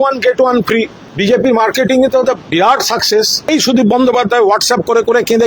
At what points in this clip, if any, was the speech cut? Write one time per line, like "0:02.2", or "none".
0:01.0
0:03.4